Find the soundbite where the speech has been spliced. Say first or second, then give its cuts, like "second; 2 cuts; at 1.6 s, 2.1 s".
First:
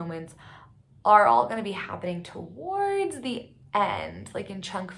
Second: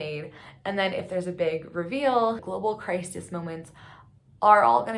second; 1 cut; at 2.4 s